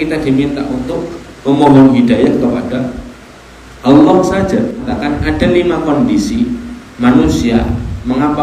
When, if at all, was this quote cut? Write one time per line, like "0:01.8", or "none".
0:04.9